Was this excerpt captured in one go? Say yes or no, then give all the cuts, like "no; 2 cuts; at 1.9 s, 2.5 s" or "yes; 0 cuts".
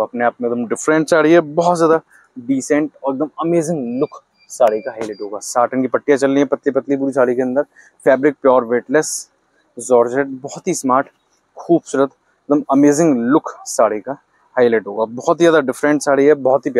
yes; 0 cuts